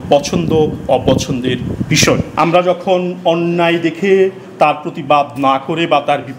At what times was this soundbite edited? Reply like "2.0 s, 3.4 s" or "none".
2.3 s